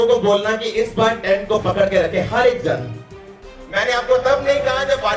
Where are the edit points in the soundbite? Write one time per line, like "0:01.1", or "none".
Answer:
0:03.5